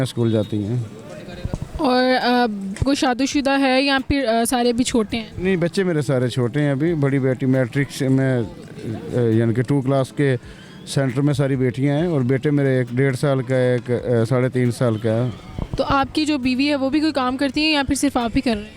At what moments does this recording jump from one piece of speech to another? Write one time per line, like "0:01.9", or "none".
none